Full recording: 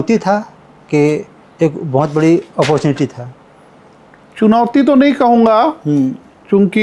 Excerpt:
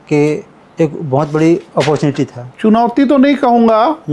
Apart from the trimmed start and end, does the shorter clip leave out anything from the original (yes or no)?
yes